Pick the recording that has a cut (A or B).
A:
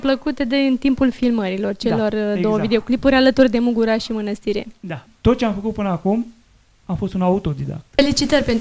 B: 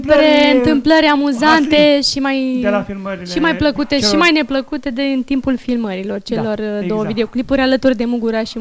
A